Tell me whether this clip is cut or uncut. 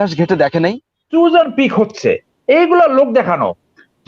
cut